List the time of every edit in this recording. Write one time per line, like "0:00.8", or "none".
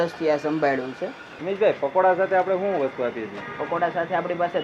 0:01.3